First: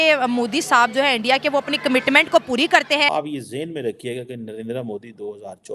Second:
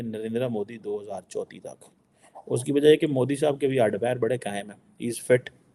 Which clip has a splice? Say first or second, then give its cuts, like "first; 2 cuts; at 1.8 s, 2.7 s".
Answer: first; 1 cut; at 3.1 s